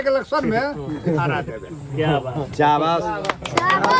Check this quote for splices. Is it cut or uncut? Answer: uncut